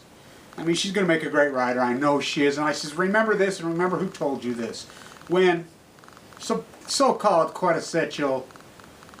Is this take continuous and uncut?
yes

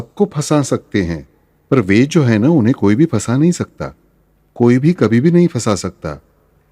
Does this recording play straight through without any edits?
yes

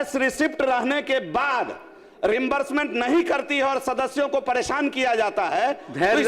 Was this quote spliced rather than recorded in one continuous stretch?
no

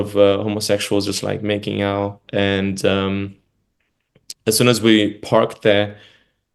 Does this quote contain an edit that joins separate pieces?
no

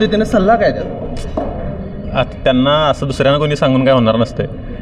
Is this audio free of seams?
yes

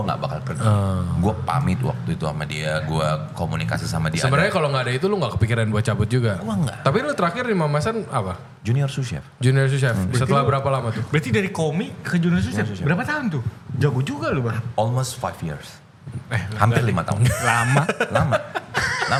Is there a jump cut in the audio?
no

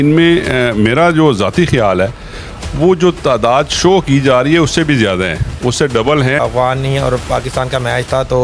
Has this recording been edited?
yes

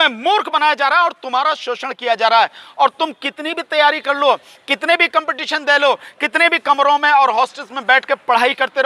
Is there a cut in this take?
no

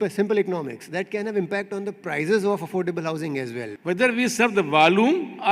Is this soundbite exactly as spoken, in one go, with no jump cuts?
no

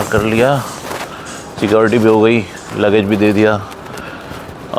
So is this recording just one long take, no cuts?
yes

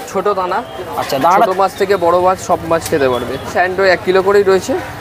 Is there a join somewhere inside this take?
yes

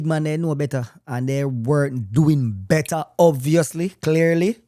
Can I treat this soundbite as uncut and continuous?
yes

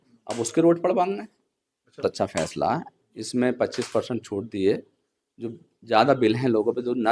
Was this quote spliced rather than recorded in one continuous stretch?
yes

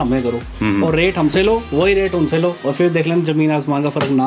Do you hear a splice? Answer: no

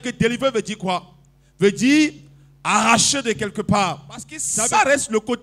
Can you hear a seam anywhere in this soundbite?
yes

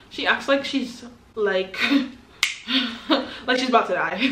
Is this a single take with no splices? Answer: yes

